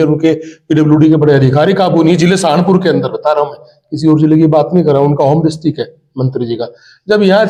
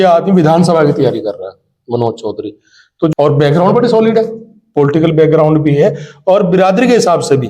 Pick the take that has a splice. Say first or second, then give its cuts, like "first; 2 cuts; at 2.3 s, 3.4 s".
second; 1 cut; at 3.1 s